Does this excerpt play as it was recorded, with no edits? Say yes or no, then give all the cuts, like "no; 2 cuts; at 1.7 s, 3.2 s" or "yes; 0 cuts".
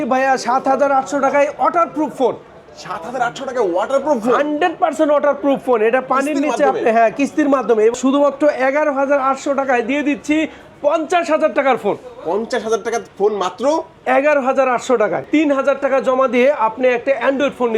no; 2 cuts; at 7.9 s, 15.2 s